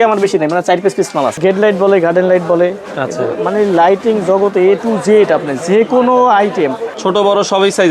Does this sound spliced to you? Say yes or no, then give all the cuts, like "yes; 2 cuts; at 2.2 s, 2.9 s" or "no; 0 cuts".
yes; 2 cuts; at 1.4 s, 6.9 s